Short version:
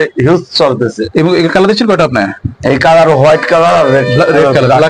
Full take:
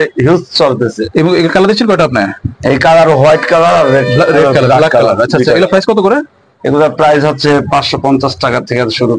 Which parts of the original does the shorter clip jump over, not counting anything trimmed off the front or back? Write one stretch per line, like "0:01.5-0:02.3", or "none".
none